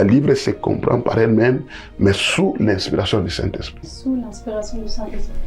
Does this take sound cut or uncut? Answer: uncut